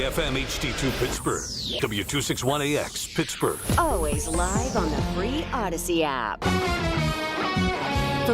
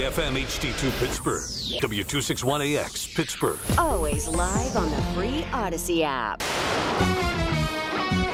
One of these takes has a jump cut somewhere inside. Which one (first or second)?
first